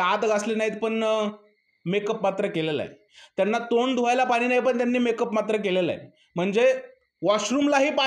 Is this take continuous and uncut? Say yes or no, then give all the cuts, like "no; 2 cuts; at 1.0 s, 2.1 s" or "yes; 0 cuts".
yes; 0 cuts